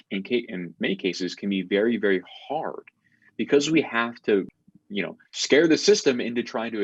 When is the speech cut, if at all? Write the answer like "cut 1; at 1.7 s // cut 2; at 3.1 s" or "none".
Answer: cut 1; at 4.5 s